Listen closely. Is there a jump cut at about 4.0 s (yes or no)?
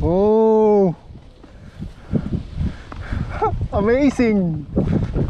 no